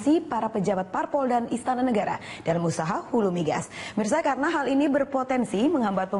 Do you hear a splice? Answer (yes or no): yes